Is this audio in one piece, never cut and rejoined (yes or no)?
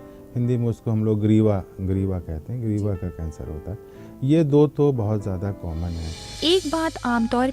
no